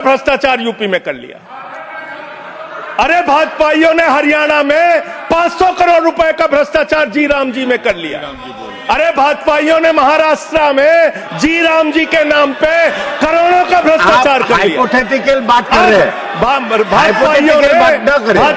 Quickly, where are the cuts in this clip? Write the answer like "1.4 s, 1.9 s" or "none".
none